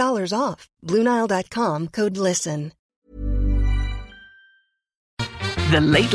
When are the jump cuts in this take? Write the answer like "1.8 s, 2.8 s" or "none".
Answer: 2.8 s, 5.3 s